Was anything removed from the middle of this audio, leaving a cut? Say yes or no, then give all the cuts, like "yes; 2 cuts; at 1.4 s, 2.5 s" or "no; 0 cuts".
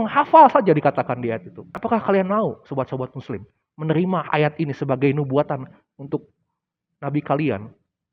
yes; 1 cut; at 1.8 s